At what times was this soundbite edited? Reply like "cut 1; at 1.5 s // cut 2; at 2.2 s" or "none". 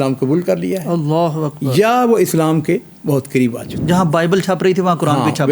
cut 1; at 3.8 s